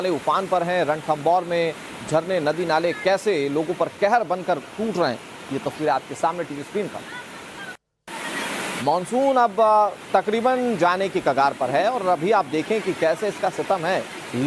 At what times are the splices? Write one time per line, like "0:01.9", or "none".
none